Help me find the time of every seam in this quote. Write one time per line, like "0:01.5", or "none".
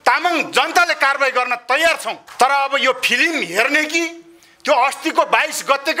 0:02.2